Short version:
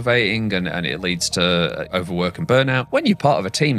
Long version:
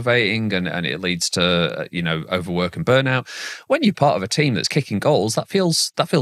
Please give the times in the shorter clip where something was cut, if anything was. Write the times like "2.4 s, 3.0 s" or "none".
1.9 s, 2.8 s